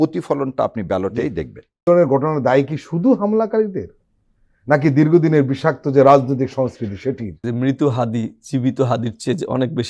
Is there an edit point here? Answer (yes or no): yes